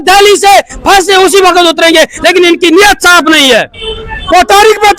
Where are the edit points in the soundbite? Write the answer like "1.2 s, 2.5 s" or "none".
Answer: 3.8 s

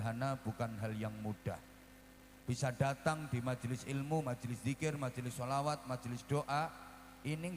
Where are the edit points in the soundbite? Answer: none

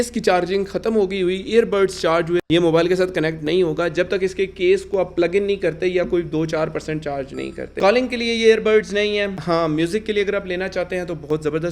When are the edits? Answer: 2.4 s, 7.7 s

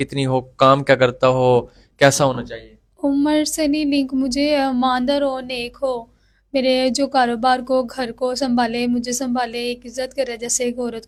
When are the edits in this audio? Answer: none

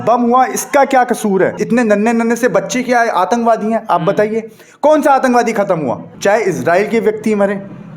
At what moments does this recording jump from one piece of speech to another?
1.6 s, 6.1 s

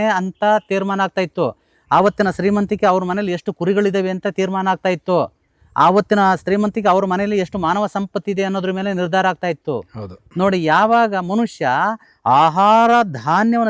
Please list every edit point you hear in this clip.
none

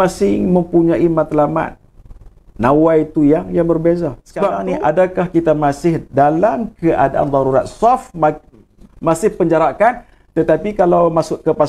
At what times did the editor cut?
4.6 s

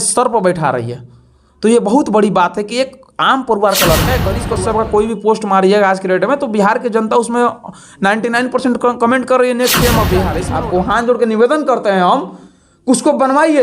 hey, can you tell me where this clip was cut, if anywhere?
4.4 s, 10.4 s

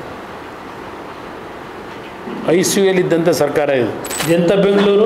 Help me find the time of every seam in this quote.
4.1 s

